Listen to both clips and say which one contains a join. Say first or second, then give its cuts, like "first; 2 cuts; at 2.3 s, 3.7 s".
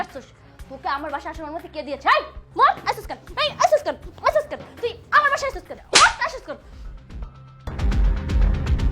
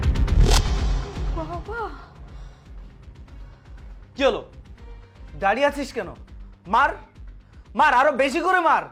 first; 3 cuts; at 2.5 s, 5.7 s, 7.7 s